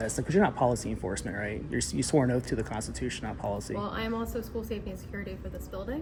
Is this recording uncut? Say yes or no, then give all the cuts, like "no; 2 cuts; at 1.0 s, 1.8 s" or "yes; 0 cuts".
yes; 0 cuts